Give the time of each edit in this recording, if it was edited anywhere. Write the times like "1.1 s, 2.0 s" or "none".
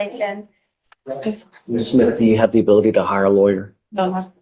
none